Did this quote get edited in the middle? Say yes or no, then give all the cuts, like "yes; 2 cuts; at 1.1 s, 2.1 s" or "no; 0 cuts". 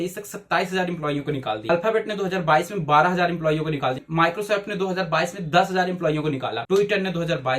yes; 2 cuts; at 1.6 s, 4.0 s